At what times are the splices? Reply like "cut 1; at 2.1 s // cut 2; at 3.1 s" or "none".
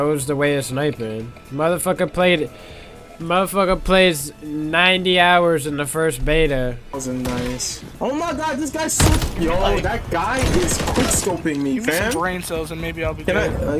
cut 1; at 6.9 s